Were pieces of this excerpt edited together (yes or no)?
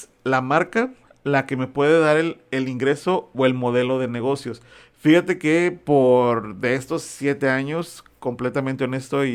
no